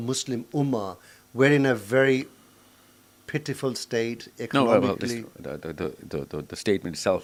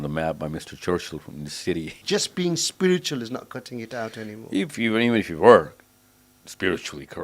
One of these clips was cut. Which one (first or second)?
second